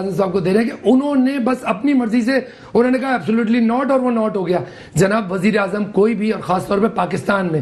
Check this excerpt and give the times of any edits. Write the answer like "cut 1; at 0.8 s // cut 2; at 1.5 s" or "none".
none

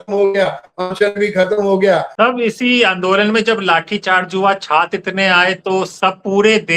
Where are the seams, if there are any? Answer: cut 1; at 2.1 s

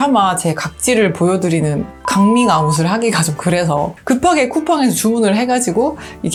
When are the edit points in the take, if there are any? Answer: none

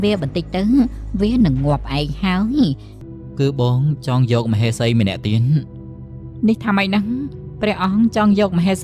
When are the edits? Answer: cut 1; at 2.9 s

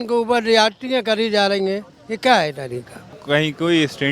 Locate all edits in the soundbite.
cut 1; at 3.2 s

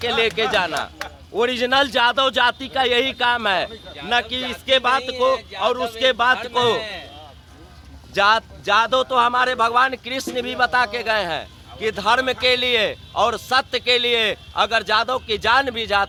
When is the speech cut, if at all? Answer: none

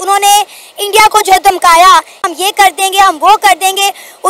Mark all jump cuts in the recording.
cut 1; at 2.2 s

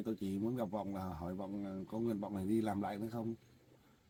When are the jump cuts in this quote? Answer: none

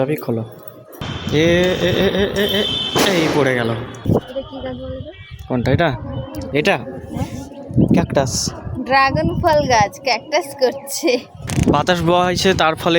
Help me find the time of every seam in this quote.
cut 1; at 0.9 s // cut 2; at 4.1 s // cut 3; at 11.4 s

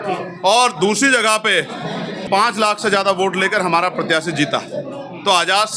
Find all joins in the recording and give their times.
cut 1; at 2.2 s

